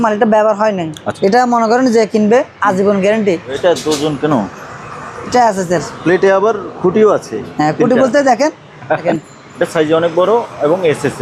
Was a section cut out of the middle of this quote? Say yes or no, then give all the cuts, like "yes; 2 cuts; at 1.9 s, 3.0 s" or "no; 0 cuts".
yes; 3 cuts; at 1.0 s, 3.5 s, 9.0 s